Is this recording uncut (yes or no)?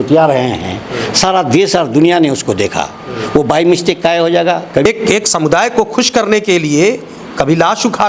no